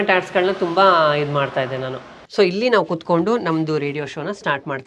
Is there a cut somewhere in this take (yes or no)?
yes